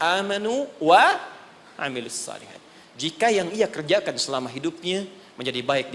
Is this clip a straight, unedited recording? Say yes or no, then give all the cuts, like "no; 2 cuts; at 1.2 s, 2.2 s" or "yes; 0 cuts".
yes; 0 cuts